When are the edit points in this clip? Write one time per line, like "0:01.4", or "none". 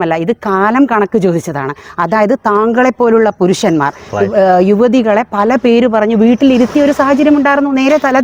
none